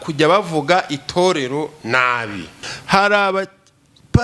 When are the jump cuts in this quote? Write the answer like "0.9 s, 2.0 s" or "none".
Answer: 2.7 s